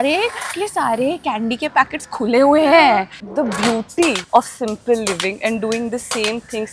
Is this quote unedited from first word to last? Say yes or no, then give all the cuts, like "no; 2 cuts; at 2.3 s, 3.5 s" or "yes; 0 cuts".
no; 2 cuts; at 3.2 s, 4.2 s